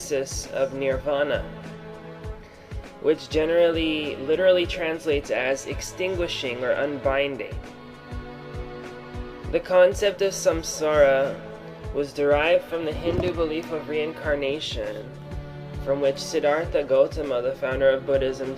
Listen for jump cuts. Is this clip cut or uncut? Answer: cut